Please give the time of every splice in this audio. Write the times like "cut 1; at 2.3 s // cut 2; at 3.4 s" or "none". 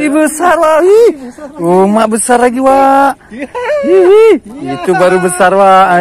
none